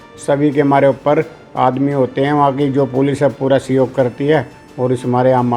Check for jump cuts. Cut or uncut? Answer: uncut